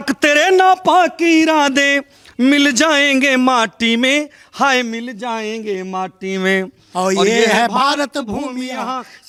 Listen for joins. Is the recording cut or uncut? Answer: uncut